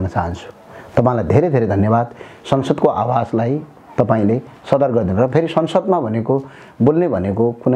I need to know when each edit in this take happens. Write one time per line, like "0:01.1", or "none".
none